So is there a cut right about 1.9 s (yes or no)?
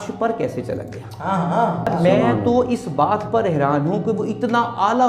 yes